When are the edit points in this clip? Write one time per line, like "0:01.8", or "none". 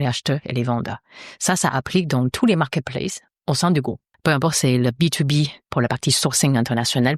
0:03.3
0:04.1
0:05.6